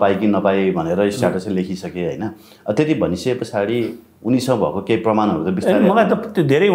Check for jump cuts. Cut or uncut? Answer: uncut